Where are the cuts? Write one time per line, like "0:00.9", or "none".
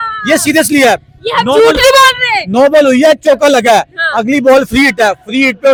none